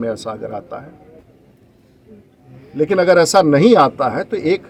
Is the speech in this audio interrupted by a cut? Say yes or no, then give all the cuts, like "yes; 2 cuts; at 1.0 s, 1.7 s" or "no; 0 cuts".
no; 0 cuts